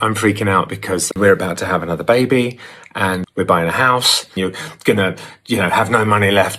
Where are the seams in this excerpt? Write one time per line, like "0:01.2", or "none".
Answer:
0:01.1
0:03.2
0:04.3